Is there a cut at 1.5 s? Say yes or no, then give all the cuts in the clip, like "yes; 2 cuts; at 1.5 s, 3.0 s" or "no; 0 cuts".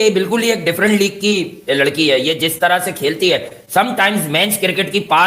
no; 0 cuts